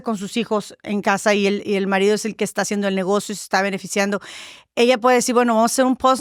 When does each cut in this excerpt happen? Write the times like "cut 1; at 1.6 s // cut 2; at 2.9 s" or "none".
none